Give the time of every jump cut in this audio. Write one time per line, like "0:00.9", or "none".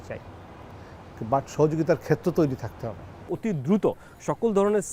0:03.0